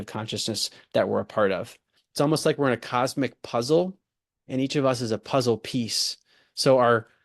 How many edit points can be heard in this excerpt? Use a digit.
1